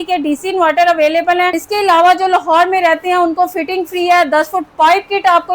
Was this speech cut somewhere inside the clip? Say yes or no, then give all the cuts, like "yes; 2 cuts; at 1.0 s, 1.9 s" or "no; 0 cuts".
yes; 1 cut; at 1.6 s